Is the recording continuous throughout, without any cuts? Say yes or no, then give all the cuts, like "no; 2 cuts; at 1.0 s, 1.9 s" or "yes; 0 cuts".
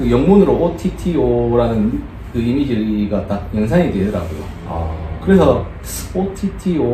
yes; 0 cuts